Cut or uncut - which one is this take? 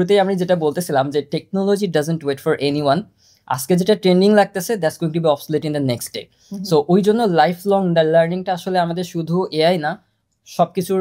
uncut